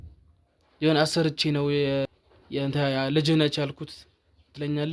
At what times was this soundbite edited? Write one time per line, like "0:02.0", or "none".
0:02.0